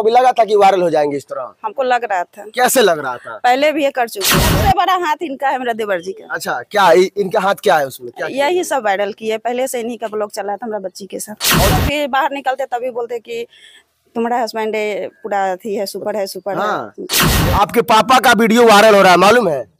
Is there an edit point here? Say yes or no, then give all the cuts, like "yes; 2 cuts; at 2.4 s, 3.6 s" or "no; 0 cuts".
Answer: yes; 3 cuts; at 4.5 s, 11.6 s, 17.3 s